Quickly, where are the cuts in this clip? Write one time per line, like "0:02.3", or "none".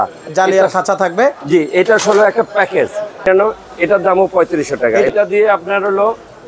0:03.3
0:05.1